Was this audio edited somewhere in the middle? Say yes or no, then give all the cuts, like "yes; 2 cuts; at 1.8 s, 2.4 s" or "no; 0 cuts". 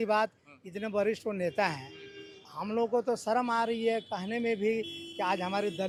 no; 0 cuts